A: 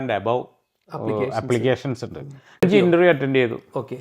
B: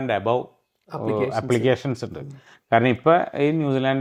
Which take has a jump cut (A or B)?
A